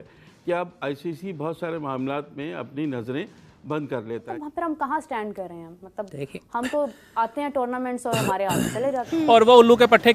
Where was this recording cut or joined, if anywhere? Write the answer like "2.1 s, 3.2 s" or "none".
4.3 s, 9.1 s